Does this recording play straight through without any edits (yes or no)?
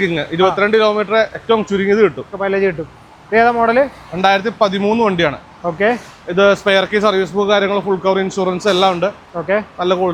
yes